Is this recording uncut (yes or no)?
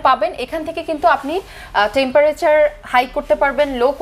yes